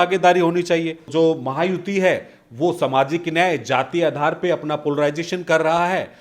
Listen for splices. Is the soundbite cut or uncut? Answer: cut